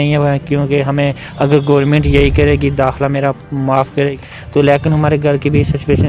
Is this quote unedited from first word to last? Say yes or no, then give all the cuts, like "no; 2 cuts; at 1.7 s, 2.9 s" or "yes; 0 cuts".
no; 1 cut; at 4.2 s